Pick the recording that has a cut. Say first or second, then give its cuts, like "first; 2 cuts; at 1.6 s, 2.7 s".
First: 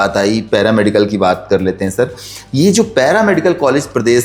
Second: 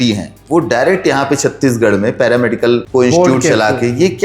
second; 1 cut; at 2.9 s